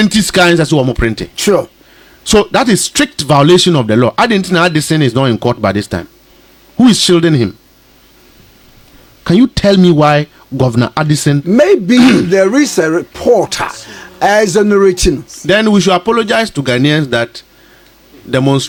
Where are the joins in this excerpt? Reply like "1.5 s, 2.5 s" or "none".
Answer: none